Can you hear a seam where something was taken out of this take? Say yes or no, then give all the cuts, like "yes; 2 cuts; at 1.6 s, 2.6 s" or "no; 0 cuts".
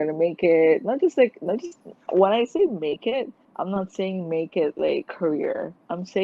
yes; 2 cuts; at 3.4 s, 5.1 s